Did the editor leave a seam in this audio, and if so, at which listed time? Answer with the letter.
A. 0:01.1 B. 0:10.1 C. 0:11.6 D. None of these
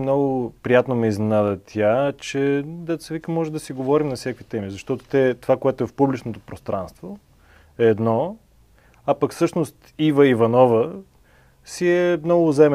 D